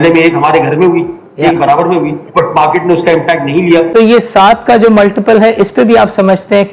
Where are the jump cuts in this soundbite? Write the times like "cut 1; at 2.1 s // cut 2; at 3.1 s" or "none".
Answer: cut 1; at 3.9 s